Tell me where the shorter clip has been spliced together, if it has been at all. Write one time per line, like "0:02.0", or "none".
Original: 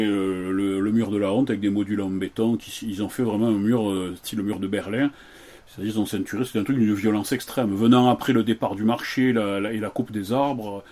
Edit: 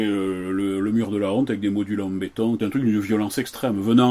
0:02.6